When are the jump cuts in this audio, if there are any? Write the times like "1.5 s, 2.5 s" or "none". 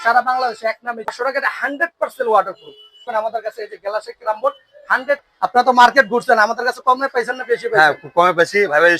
3.1 s, 5.2 s